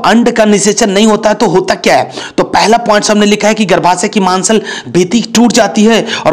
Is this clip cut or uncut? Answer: uncut